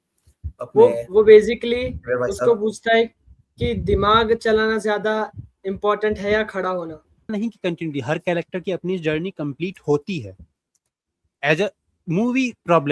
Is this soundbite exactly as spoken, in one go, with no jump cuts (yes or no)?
no